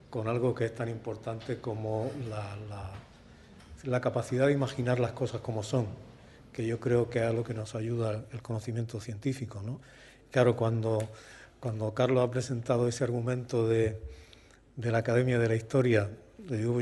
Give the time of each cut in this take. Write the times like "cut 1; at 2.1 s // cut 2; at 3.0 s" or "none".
cut 1; at 15.2 s